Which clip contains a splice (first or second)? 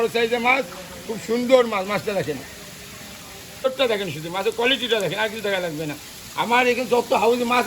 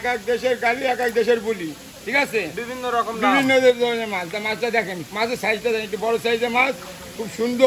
first